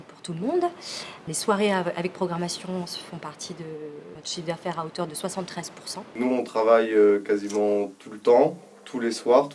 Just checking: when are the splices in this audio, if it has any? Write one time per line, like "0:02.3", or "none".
0:00.9
0:04.2
0:06.1